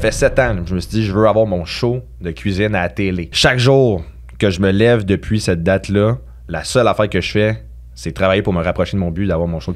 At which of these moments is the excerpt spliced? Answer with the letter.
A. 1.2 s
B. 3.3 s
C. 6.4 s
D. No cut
B